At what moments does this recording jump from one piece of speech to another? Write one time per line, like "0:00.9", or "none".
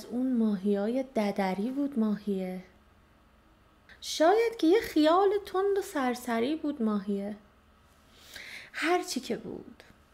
0:03.9